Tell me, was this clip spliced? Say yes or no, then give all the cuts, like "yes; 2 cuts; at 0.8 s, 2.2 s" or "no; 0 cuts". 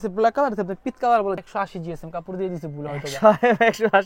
yes; 1 cut; at 1.4 s